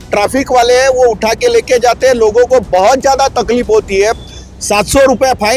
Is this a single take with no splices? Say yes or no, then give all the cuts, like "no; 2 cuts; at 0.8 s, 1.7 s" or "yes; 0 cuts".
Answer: yes; 0 cuts